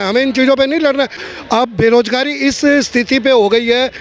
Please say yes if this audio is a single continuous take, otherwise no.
no